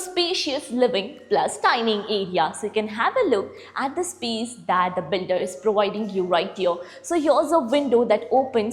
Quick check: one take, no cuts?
yes; 0 cuts

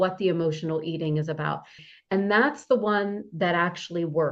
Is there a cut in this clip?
yes; 1 cut; at 1.8 s

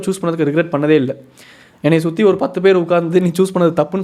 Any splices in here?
no; 0 cuts

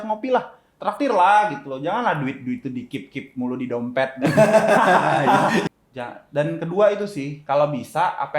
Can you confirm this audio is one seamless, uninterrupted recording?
no; 1 cut; at 5.7 s

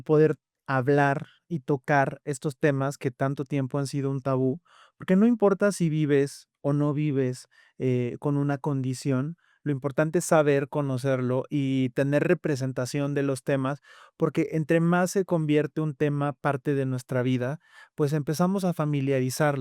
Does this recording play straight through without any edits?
yes; 0 cuts

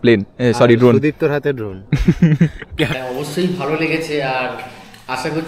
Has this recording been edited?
yes; 1 cut; at 3.0 s

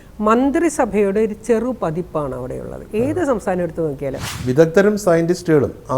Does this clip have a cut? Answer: yes; 1 cut; at 4.3 s

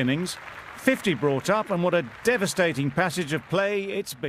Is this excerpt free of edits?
yes; 0 cuts

